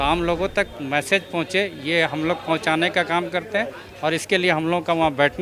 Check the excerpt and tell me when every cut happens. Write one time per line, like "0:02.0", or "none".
none

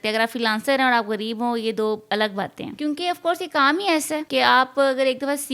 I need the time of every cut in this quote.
0:02.6
0:04.2

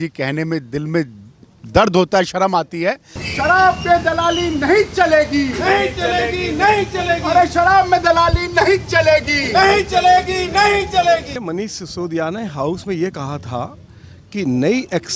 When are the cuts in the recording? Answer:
0:03.2
0:11.3

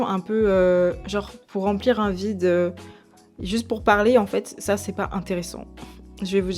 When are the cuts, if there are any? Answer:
none

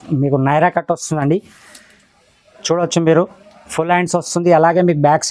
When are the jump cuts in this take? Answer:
none

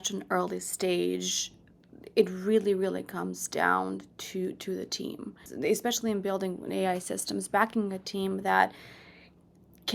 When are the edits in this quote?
0:05.5

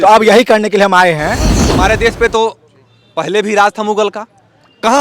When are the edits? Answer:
0:01.6

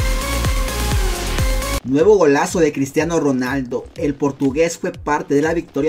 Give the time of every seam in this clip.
0:01.8

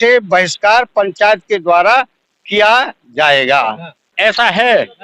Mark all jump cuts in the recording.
0:04.1

